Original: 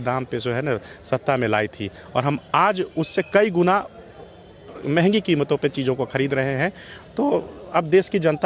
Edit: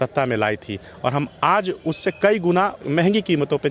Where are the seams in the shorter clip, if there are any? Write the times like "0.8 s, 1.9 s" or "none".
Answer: 2.8 s